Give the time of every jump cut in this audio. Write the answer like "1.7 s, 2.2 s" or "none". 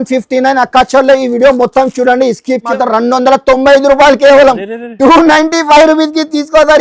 2.6 s